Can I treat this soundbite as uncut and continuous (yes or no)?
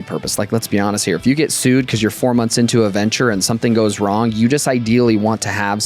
yes